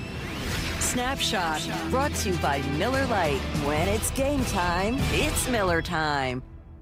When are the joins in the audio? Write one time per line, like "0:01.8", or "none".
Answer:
none